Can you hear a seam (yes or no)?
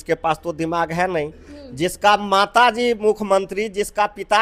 no